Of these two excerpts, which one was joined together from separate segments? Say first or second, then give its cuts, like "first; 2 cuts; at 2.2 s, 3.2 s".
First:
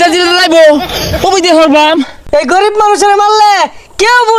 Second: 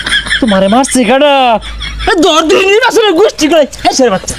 first; 1 cut; at 2.2 s